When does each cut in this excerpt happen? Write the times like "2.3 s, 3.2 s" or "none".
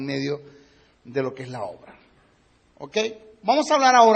none

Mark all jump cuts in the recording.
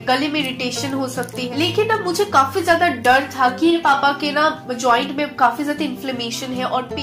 1.4 s, 3.8 s

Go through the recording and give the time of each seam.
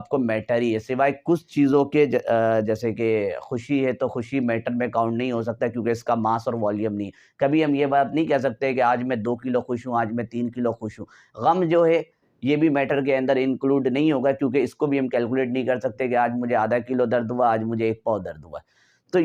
none

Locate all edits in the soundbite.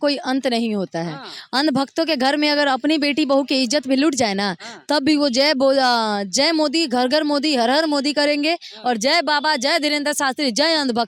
none

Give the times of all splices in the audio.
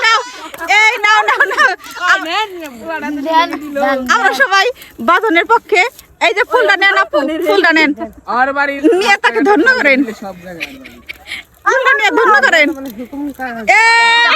none

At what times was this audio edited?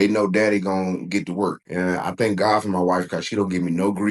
1.6 s

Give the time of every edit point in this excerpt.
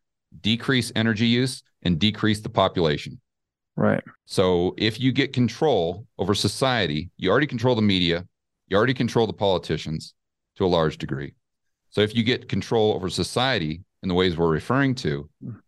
4.2 s

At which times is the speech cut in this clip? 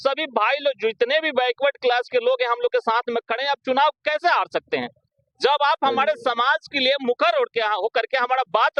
none

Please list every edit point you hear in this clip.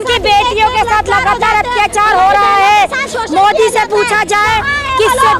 none

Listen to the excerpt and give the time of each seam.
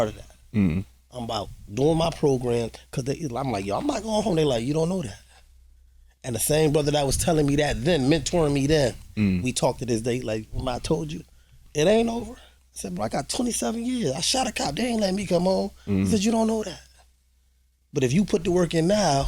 12.5 s

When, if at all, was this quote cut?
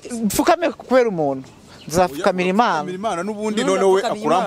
none

